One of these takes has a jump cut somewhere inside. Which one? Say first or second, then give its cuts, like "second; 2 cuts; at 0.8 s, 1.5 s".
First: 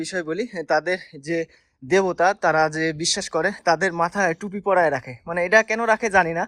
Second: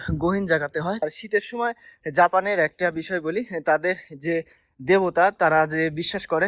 second; 1 cut; at 1.0 s